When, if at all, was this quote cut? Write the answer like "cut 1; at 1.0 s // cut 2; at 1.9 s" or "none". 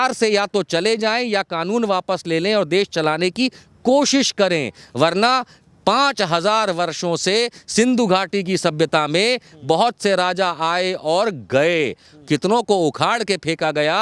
none